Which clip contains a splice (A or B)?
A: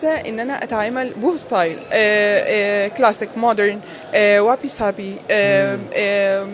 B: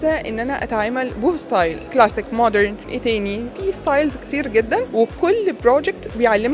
B